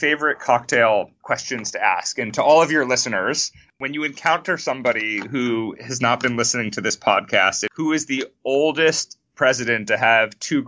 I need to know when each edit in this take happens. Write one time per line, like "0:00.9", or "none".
0:01.2
0:03.7
0:07.6